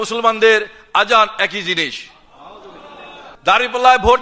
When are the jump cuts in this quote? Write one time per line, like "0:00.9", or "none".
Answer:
0:03.3

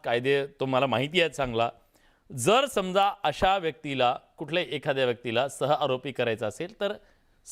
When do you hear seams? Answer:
none

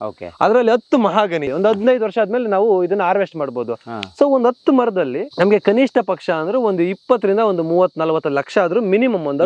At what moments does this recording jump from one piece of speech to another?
0:01.5
0:05.2

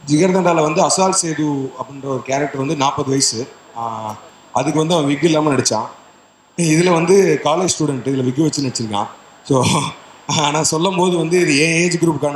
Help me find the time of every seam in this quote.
none

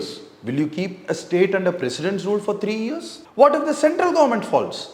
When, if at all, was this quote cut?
0:03.1

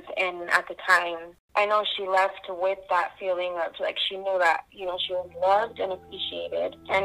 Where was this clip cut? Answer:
0:01.5

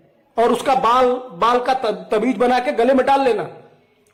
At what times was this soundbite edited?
none

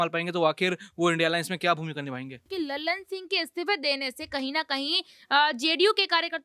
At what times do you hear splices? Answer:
0:02.4

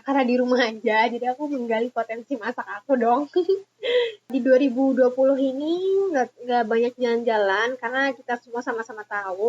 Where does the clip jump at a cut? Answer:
0:04.3

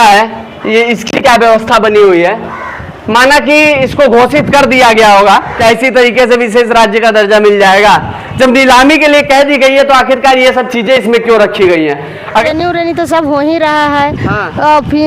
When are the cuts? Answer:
0:05.5
0:12.4

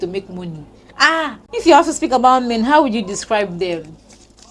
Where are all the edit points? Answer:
none

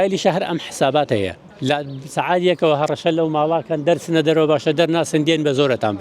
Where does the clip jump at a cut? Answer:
0:01.4

